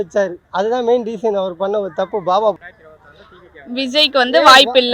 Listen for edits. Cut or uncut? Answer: cut